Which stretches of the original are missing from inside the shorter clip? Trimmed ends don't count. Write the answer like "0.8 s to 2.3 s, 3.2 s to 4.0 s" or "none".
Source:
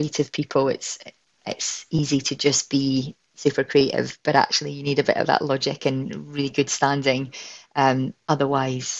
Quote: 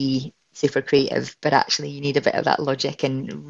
none

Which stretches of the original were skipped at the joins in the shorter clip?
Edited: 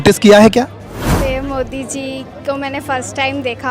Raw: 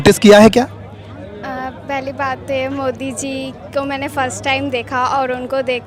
1.1 s to 2.4 s

